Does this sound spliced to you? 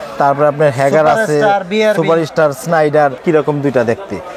yes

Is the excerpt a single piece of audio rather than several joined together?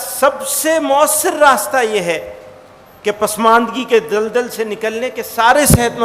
yes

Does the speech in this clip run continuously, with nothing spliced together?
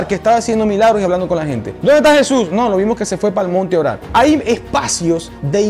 no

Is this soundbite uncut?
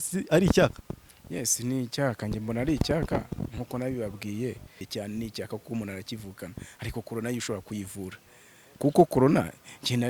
no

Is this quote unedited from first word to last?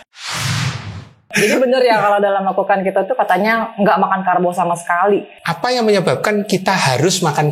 no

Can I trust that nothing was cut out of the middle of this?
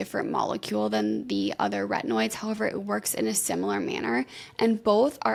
yes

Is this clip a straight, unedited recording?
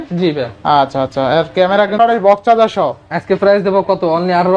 no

